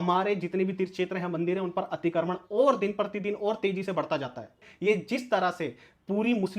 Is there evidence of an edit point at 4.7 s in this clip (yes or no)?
yes